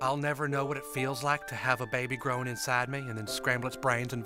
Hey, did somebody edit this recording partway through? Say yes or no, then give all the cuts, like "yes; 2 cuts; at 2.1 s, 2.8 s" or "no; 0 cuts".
no; 0 cuts